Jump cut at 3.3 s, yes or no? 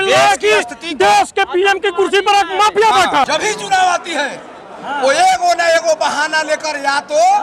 yes